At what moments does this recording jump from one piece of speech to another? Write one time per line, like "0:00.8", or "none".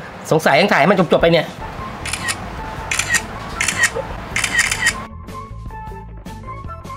none